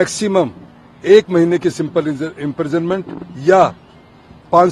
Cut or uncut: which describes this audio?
uncut